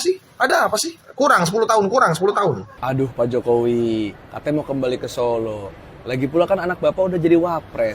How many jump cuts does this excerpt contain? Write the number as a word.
two